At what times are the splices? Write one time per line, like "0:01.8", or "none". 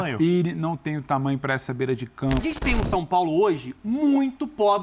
0:02.4